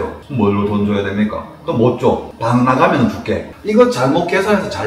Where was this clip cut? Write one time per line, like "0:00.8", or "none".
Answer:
0:03.5

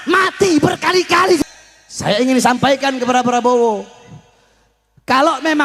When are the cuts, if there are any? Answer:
0:01.4

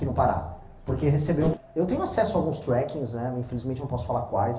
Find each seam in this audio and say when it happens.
0:01.5

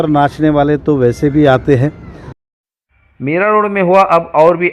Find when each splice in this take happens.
0:02.4

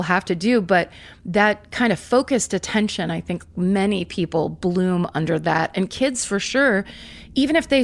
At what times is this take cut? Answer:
none

